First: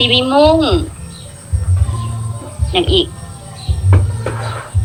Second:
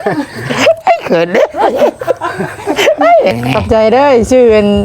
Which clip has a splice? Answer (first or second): second